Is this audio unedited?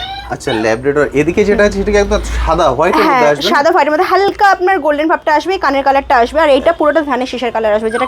yes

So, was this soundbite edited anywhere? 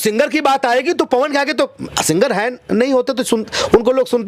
no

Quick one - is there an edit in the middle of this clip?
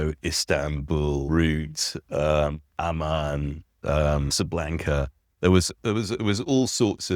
yes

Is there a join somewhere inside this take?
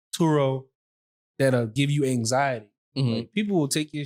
no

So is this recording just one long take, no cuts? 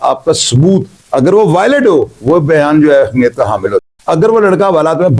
no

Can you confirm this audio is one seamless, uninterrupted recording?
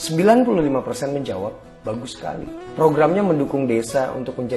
yes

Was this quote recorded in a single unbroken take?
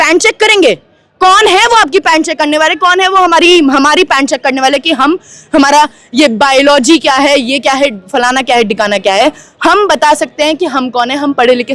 yes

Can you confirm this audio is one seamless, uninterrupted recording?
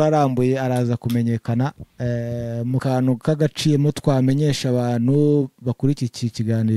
no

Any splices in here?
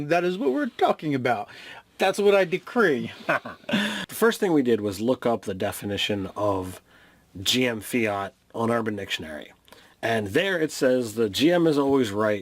yes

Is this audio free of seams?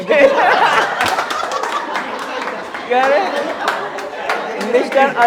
yes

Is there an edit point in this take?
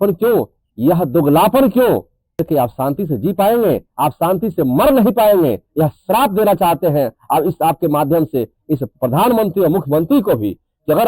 yes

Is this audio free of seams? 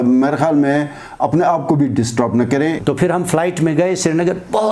no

